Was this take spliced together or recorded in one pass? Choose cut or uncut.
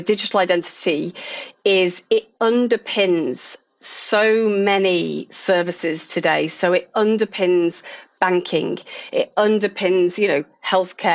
uncut